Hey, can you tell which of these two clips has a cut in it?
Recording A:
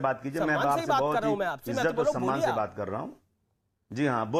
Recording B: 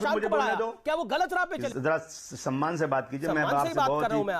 B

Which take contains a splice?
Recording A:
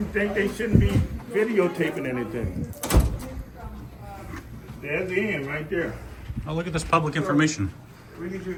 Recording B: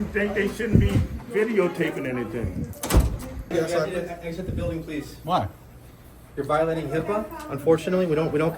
B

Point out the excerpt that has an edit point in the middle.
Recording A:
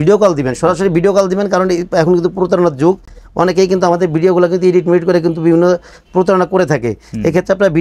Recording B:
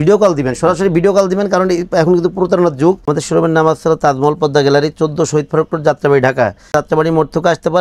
B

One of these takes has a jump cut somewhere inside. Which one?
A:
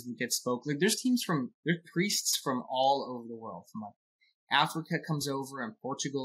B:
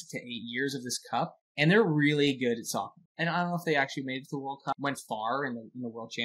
B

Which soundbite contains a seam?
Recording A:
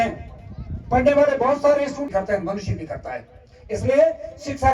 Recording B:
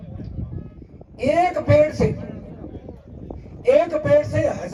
A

